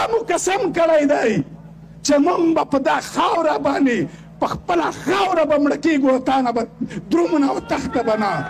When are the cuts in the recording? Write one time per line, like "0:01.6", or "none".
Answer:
none